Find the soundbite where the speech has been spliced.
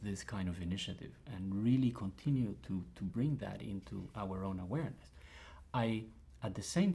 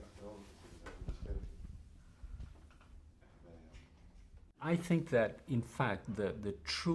first; 1 cut; at 2.6 s

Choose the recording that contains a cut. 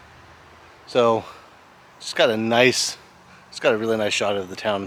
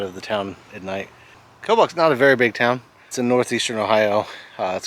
second; 2 cuts; at 1.5 s, 3.1 s

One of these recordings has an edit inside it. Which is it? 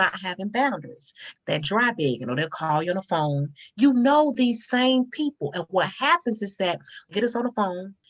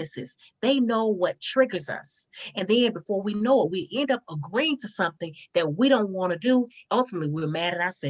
second; 1 cut; at 6.8 s

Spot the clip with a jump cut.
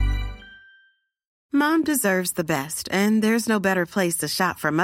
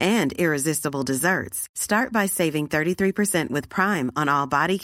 first; 1 cut; at 1.3 s

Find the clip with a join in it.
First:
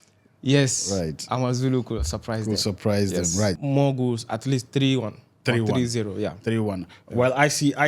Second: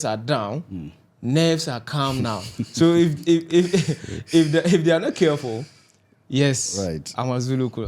first; 1 cut; at 3.6 s

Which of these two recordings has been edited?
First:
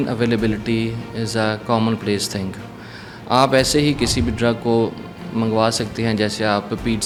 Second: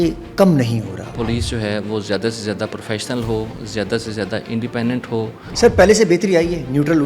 second; 2 cuts; at 1.1 s, 5.5 s

